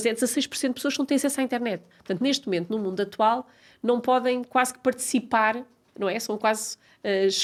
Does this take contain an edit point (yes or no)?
no